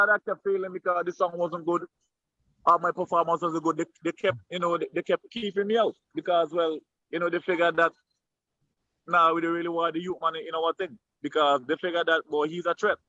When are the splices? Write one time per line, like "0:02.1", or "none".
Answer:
none

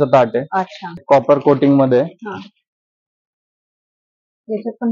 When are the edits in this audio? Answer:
0:01.0

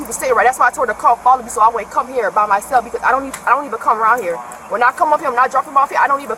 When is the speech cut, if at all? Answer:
none

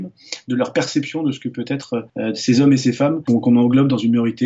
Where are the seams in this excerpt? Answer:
0:02.1
0:03.2

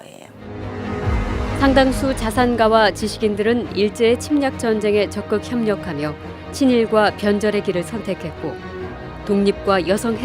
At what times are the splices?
0:01.4

